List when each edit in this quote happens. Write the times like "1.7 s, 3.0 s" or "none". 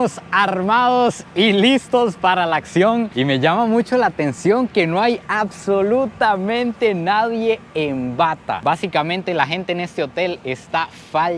none